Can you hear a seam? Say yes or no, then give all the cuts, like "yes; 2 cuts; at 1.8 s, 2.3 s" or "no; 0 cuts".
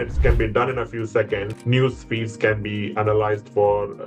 yes; 1 cut; at 1.5 s